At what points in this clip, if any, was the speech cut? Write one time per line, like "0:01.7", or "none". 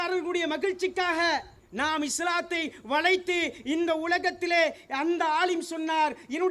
0:01.6